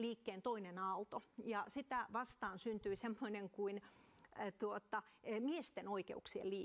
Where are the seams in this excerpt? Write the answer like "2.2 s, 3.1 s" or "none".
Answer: 5.7 s